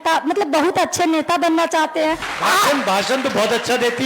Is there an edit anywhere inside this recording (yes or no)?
yes